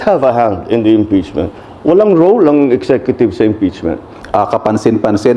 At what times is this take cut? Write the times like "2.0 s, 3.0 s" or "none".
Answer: 4.1 s